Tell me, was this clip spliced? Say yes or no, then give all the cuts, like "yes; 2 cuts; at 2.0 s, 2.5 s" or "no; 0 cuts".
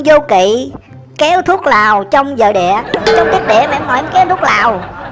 yes; 1 cut; at 3.0 s